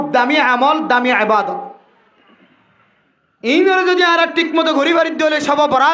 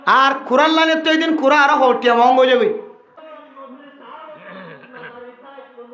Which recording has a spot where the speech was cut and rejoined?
second; 1 cut; at 3.2 s

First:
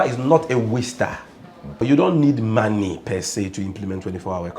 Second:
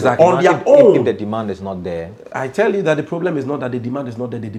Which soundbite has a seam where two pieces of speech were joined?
first; 1 cut; at 1.8 s

